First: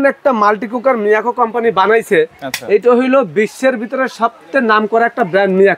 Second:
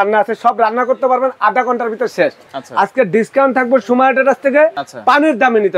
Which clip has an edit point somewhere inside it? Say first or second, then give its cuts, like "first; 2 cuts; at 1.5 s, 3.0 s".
second; 2 cuts; at 2.4 s, 4.9 s